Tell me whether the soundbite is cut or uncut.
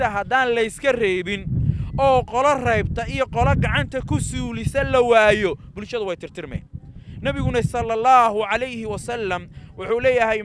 uncut